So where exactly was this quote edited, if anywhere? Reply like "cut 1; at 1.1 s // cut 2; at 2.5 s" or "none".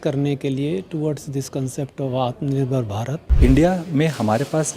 cut 1; at 3.2 s